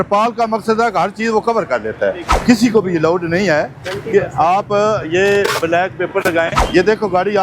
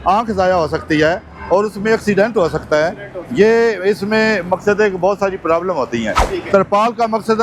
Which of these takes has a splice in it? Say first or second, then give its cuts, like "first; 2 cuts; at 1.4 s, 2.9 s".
first; 2 cuts; at 2.3 s, 6.6 s